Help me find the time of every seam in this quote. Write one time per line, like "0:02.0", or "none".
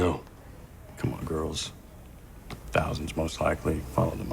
0:01.2